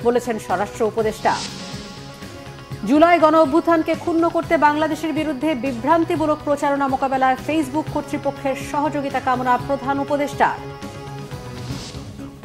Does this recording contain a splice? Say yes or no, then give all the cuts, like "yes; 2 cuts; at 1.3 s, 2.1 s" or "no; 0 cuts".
yes; 1 cut; at 11.6 s